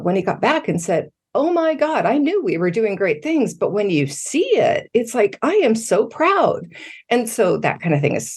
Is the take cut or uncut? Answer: uncut